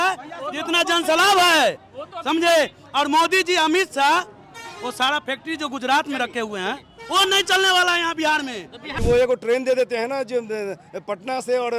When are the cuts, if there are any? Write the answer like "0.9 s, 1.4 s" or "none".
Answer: 8.8 s